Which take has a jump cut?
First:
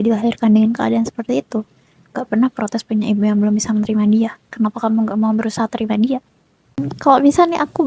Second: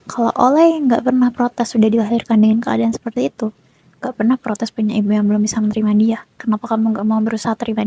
first; 1 cut; at 6.9 s

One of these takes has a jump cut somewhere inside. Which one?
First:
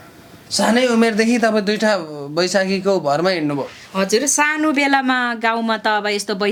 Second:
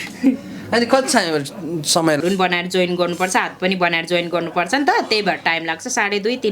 second; 1 cut; at 2.2 s

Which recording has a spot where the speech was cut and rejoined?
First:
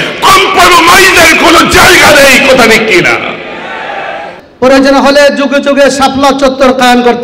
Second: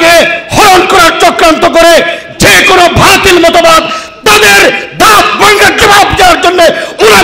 first; 1 cut; at 4.3 s

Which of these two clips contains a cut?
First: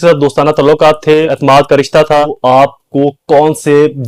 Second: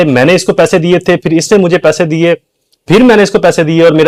first; 2 cuts; at 1.3 s, 2.4 s

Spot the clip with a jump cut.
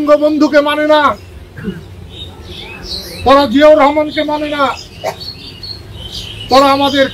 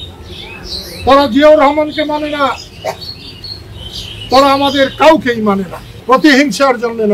second; 1 cut; at 6.0 s

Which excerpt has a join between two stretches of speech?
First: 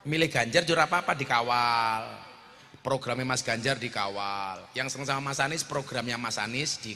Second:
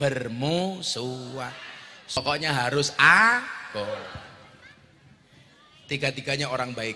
second; 1 cut; at 2.2 s

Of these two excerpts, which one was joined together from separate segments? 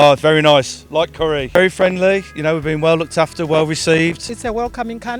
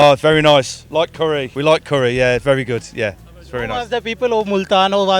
first; 2 cuts; at 1.5 s, 4.3 s

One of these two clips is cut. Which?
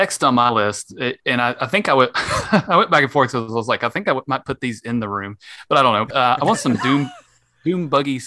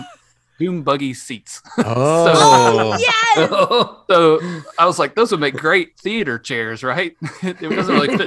first; 1 cut; at 6.1 s

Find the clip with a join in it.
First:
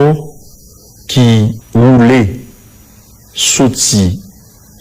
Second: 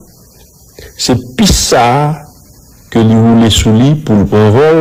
first; 1 cut; at 1.6 s

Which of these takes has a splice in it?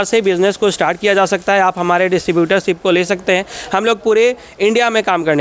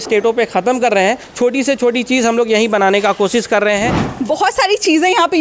second; 2 cuts; at 1.3 s, 4.0 s

